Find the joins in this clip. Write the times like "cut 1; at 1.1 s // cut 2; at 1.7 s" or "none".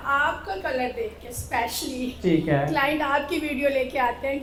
none